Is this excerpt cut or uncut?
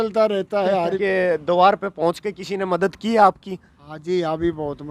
cut